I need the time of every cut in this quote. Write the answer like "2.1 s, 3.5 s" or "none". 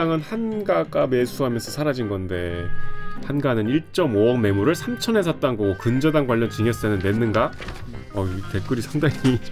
none